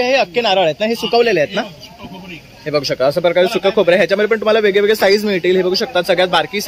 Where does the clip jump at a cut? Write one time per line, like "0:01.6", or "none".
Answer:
none